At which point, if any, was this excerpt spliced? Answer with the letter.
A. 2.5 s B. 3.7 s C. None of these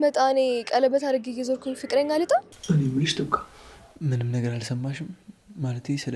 A